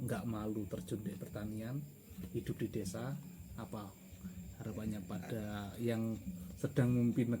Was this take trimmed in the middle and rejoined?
no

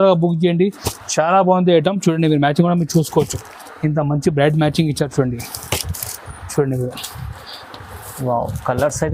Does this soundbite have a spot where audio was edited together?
no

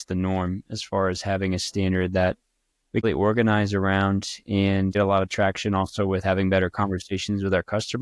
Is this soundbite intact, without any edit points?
no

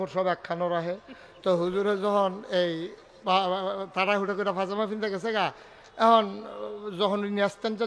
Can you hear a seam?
no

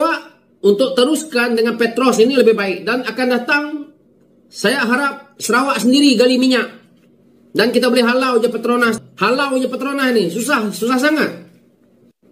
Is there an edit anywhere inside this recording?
yes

